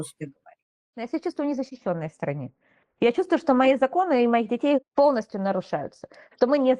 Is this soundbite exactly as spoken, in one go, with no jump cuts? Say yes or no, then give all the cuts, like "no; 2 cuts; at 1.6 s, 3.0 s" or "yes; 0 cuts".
no; 1 cut; at 0.9 s